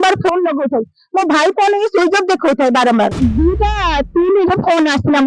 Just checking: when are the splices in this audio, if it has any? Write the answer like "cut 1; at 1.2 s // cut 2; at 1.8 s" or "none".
cut 1; at 3.1 s